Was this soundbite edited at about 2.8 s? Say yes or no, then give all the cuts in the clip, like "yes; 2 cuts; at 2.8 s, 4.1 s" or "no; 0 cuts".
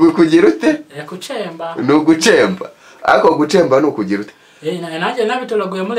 no; 1 cut; at 4.2 s